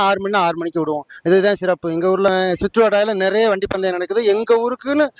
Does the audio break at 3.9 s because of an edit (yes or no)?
no